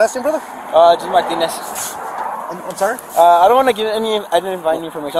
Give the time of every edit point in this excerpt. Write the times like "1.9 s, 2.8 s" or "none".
none